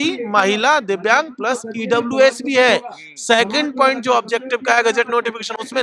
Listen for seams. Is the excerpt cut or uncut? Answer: uncut